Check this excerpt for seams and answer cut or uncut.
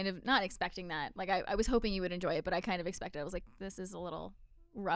uncut